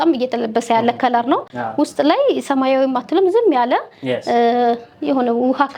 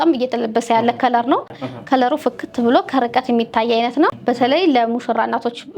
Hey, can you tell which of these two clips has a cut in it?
second; 2 cuts; at 1.6 s, 4.2 s

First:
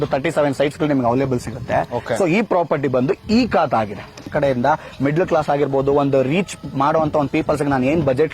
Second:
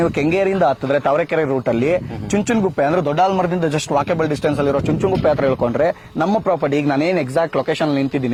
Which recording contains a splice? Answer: first; 1 cut; at 4.3 s

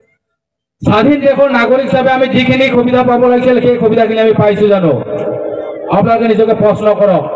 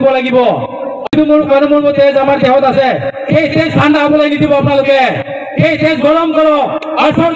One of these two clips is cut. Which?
second; 1 cut; at 1.0 s

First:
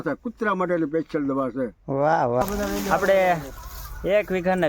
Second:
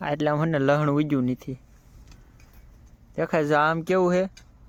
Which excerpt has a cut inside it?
first; 1 cut; at 2.4 s

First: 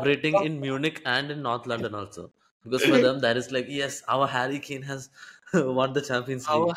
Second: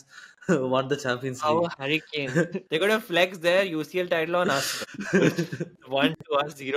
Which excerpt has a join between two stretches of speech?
second; 2 cuts; at 2.6 s, 5.7 s

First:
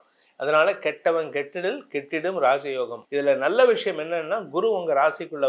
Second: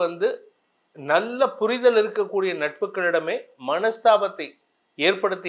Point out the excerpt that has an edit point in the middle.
first; 1 cut; at 3.0 s

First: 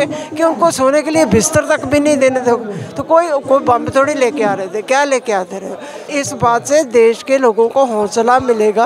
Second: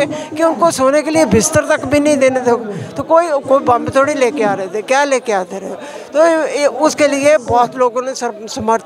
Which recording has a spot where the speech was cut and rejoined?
first; 1 cut; at 6.1 s

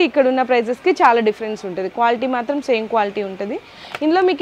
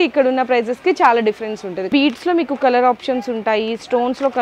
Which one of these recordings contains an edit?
second; 1 cut; at 1.9 s

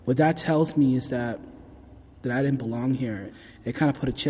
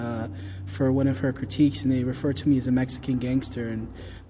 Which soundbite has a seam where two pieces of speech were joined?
first; 2 cuts; at 2.2 s, 3.3 s

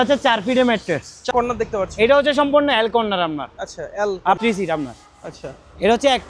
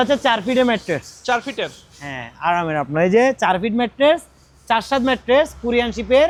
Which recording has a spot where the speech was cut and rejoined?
first; 2 cuts; at 1.2 s, 4.4 s

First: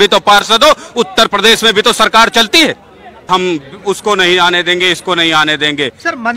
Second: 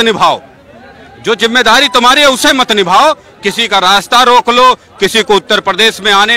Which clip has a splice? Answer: first; 1 cut; at 3.1 s

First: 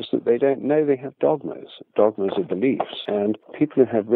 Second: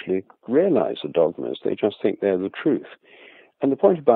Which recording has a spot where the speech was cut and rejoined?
first; 1 cut; at 3.1 s

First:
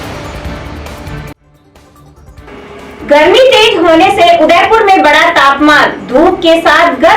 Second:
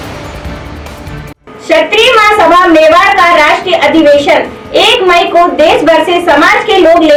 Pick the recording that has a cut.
first; 1 cut; at 1.3 s

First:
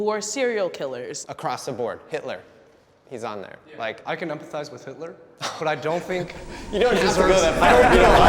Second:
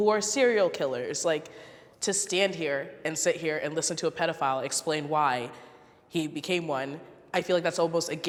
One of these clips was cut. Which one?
first; 2 cuts; at 1.1 s, 4.0 s

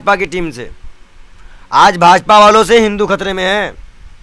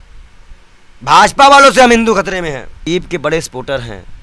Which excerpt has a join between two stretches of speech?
second; 1 cut; at 2.8 s

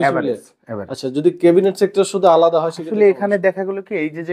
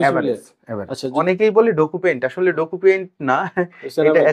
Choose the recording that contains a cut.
second; 1 cut; at 1.1 s

